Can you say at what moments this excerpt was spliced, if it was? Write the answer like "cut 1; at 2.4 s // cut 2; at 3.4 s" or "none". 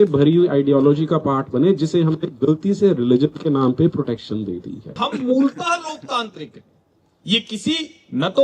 cut 1; at 5.0 s